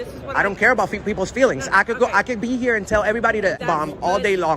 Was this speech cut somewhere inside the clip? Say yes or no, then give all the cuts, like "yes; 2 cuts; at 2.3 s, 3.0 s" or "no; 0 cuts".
yes; 1 cut; at 3.6 s